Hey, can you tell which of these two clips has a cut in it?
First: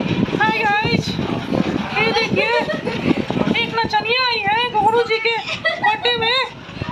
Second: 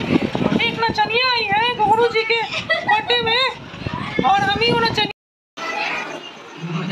second; 1 cut; at 5.1 s

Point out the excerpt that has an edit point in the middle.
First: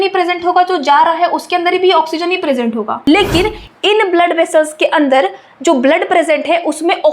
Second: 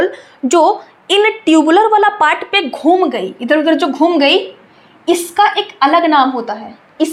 first; 1 cut; at 2.9 s

